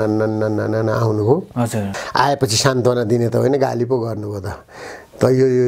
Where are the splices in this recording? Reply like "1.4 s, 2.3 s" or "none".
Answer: 2.0 s

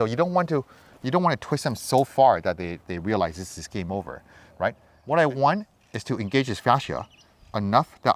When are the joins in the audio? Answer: 4.9 s

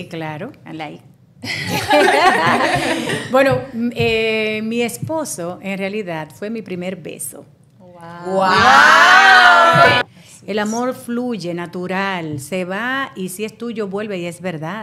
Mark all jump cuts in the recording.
10.0 s

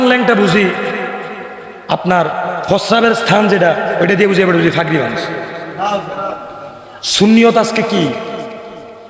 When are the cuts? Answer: 7.0 s

